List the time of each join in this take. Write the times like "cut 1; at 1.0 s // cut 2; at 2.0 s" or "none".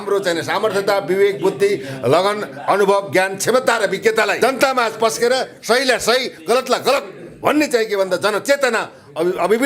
cut 1; at 4.3 s